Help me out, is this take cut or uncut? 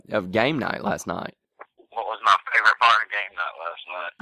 uncut